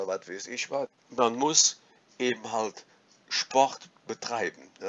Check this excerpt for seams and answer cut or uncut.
cut